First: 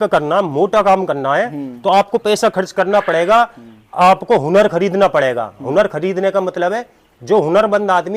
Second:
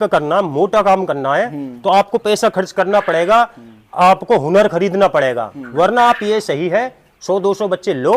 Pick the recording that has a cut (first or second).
second